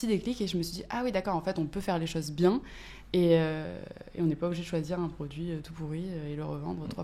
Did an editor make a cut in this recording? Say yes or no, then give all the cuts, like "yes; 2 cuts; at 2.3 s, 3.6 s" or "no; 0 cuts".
no; 0 cuts